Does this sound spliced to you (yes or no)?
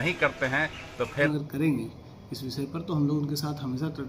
yes